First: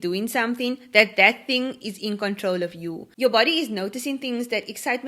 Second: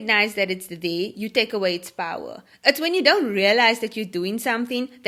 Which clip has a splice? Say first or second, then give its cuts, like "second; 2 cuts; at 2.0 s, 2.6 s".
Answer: first; 1 cut; at 3.0 s